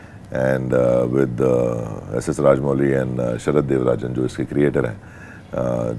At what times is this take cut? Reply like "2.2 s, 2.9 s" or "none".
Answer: none